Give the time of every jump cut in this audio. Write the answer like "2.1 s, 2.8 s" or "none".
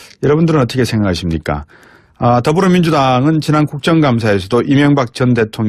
none